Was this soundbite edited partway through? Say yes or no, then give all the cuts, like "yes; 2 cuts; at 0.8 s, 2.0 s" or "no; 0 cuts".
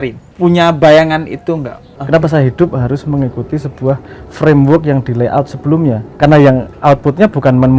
yes; 1 cut; at 2.0 s